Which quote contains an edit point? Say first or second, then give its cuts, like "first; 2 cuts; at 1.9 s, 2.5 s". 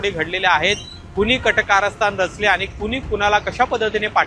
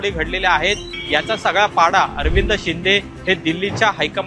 second; 1 cut; at 0.9 s